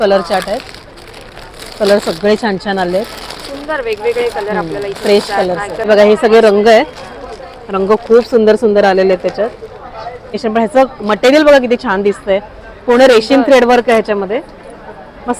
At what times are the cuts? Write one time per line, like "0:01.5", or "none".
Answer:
0:05.8
0:10.3